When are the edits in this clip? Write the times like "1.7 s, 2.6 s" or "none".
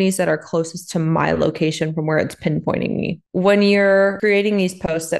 3.3 s, 4.2 s

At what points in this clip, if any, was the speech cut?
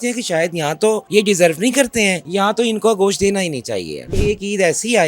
1.0 s, 2.2 s, 4.1 s

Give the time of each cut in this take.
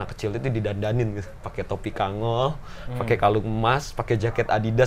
none

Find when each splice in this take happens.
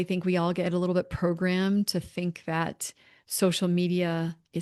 none

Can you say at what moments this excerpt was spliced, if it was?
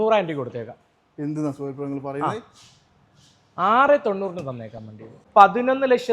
5.2 s

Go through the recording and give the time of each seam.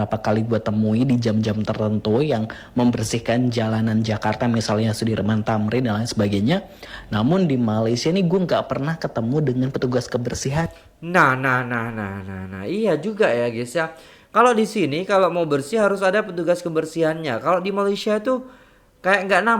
none

